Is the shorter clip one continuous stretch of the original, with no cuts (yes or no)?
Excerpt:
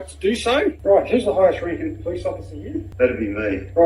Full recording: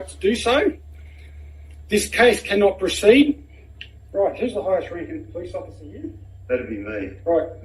no